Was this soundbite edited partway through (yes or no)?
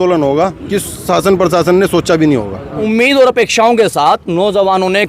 yes